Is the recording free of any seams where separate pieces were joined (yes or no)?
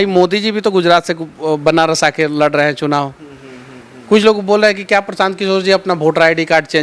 yes